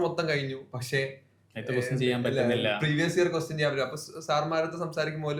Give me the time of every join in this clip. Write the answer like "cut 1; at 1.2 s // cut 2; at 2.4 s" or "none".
none

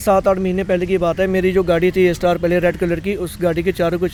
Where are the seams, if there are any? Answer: none

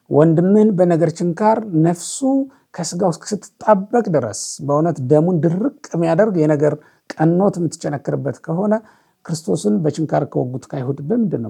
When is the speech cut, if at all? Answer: none

